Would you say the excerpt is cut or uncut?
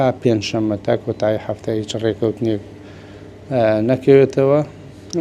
uncut